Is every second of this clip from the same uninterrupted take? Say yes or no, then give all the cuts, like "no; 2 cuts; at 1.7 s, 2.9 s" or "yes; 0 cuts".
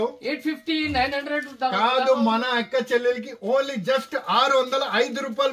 yes; 0 cuts